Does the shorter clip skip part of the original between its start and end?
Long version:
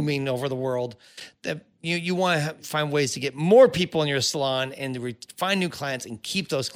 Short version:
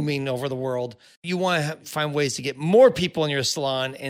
yes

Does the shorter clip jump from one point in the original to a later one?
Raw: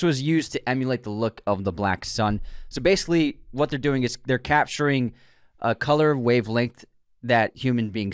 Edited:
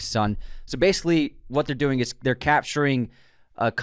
no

